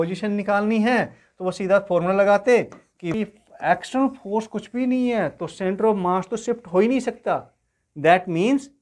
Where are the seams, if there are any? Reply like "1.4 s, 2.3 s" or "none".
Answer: 3.0 s